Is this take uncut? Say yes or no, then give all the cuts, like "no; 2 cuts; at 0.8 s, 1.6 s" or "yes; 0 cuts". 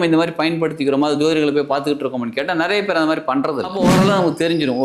no; 1 cut; at 3.7 s